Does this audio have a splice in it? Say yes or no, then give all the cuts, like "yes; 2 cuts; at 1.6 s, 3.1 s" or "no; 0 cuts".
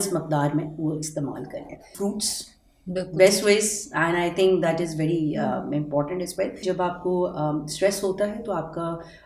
yes; 2 cuts; at 1.9 s, 6.6 s